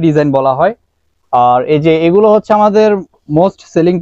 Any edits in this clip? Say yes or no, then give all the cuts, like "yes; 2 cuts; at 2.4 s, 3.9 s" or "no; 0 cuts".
no; 0 cuts